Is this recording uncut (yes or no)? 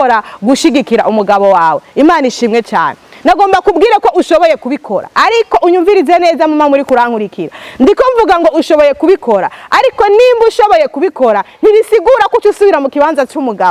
yes